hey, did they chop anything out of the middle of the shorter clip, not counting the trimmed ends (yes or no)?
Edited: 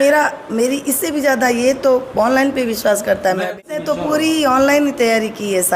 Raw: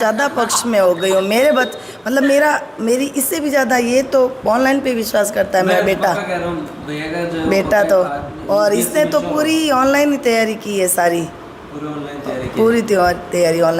yes